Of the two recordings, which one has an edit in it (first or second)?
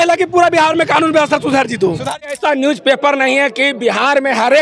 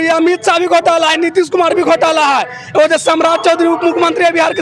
first